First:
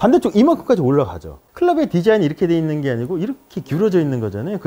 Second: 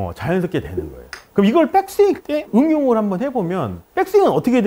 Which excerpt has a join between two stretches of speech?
first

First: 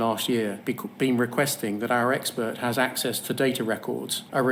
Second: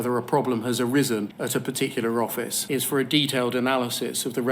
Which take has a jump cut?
second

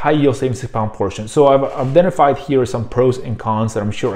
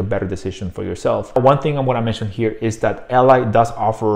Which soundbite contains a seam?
second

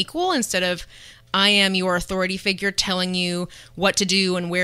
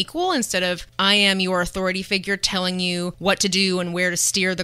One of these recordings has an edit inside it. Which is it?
second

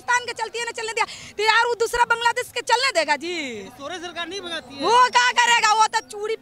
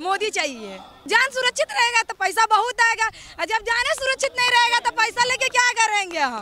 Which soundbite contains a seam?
second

